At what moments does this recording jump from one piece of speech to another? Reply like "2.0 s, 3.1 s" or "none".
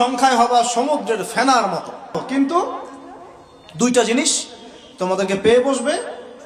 2.2 s